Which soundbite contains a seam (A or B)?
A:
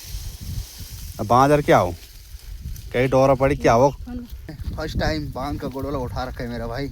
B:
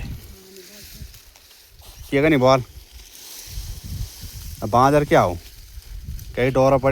A